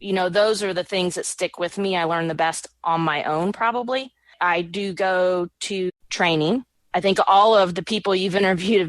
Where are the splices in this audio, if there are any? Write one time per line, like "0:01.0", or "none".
0:04.3
0:05.9
0:06.8

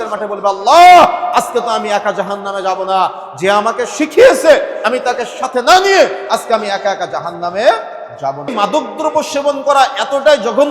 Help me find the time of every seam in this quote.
0:08.5

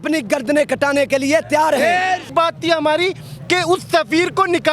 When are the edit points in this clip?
0:02.3

